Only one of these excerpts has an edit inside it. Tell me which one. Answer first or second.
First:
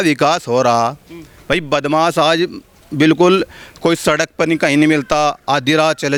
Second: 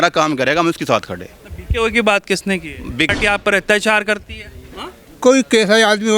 second